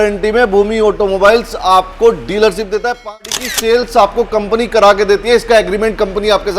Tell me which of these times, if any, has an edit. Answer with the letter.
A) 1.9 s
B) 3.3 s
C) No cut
B